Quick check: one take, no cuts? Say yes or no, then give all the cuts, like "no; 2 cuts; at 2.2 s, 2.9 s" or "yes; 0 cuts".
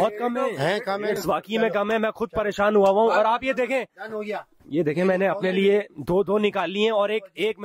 yes; 0 cuts